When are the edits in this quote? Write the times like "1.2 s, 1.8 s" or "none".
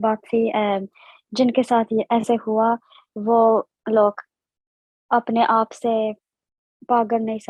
none